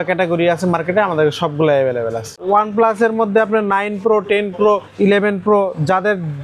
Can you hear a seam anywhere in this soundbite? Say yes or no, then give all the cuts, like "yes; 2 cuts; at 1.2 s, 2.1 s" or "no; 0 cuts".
yes; 2 cuts; at 2.4 s, 4.9 s